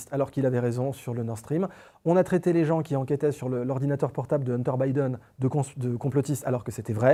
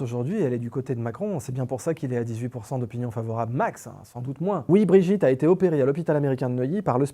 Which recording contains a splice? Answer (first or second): second